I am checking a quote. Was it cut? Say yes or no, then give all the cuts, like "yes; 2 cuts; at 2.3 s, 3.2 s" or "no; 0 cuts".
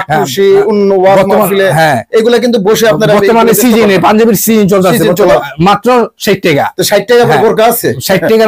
yes; 1 cut; at 5.3 s